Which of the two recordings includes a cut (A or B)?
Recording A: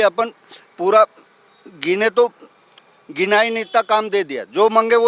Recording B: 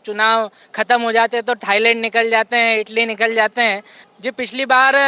B